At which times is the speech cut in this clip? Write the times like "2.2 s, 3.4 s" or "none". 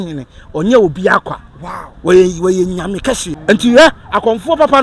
3.3 s